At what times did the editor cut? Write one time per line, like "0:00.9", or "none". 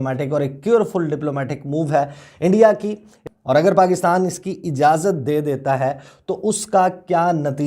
0:03.2